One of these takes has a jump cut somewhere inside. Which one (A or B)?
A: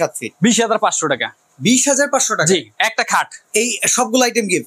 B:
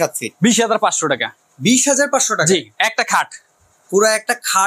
A